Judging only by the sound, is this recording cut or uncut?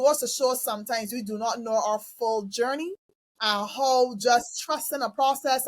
uncut